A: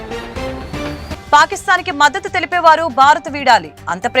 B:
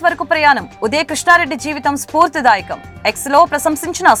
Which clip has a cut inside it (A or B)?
A